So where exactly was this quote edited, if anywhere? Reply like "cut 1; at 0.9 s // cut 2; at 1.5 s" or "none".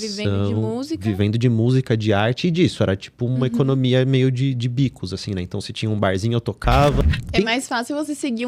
cut 1; at 7.0 s